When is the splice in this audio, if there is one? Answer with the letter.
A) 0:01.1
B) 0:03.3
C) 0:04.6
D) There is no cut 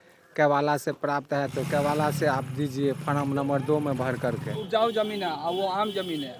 C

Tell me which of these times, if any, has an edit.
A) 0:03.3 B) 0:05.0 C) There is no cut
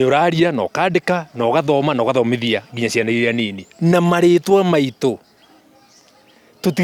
C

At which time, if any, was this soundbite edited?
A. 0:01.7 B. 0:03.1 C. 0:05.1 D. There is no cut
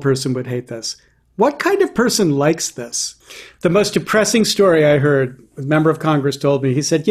B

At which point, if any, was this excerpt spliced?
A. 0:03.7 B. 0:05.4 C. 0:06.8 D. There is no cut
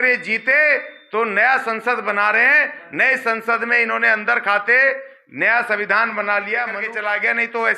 C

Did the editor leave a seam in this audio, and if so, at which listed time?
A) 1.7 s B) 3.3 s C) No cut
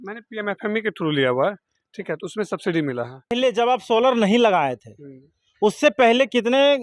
B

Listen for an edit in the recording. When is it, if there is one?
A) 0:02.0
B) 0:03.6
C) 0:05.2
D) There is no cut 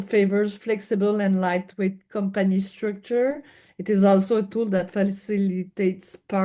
D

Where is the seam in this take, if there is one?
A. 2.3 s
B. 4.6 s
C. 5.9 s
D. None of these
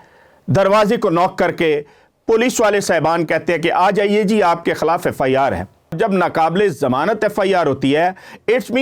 C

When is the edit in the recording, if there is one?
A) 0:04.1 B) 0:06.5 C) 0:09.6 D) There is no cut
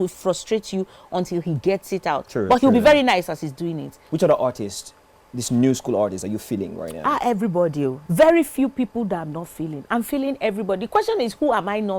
A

